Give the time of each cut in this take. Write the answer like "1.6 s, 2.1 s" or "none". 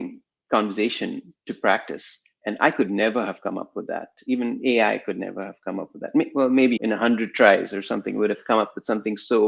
6.8 s